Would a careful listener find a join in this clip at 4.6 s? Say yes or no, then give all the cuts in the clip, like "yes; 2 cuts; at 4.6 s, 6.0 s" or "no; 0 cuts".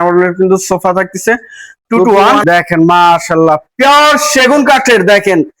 no; 1 cut; at 2.4 s